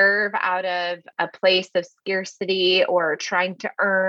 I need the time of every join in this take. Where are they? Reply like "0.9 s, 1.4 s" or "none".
1.1 s